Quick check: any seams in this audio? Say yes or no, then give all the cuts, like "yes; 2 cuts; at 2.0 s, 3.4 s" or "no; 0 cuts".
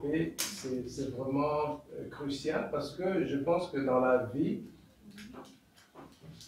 no; 0 cuts